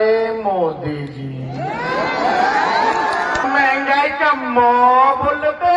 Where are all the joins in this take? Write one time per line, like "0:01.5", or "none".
0:03.4

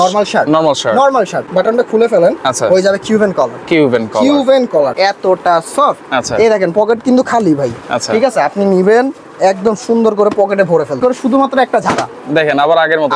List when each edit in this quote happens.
0:01.5
0:04.9
0:11.0

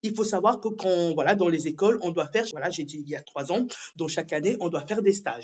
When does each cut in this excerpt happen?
0:02.5

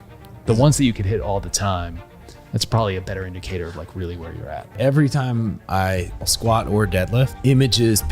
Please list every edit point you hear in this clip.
0:04.7
0:06.3
0:07.3

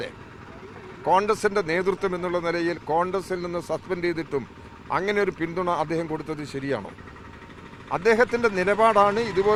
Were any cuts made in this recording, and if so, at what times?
none

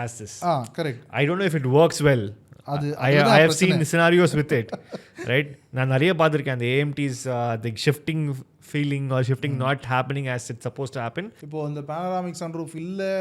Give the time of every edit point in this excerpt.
0:11.4

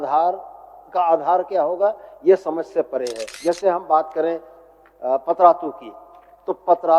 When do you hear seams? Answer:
0:03.2

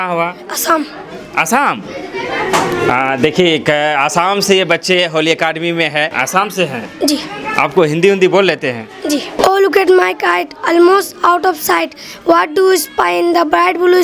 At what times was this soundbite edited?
0:06.1
0:09.4

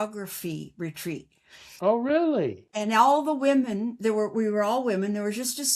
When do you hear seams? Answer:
none

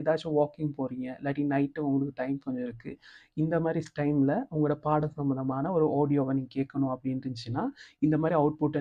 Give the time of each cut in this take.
none

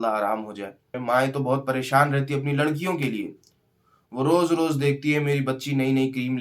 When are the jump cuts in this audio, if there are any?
0:00.9

